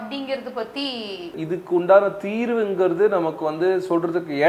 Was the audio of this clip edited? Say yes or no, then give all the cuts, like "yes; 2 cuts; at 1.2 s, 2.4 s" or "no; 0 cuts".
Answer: yes; 1 cut; at 1.4 s